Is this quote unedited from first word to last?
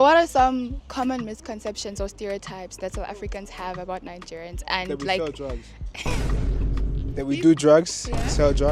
yes; 0 cuts

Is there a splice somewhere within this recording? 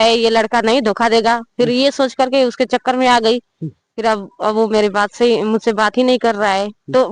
no; 0 cuts

